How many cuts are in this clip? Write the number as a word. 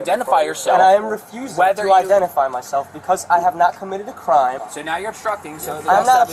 one